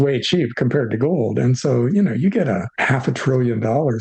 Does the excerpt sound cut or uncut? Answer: cut